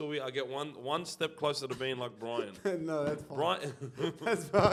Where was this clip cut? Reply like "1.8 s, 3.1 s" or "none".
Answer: none